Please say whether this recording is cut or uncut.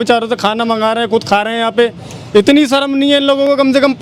uncut